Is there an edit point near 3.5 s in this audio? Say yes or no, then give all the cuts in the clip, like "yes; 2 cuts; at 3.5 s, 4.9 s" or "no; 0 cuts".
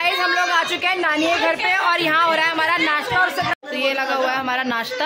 yes; 1 cut; at 3.5 s